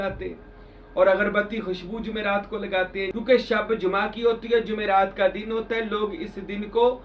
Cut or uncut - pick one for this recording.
cut